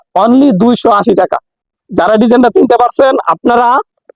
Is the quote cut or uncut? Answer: uncut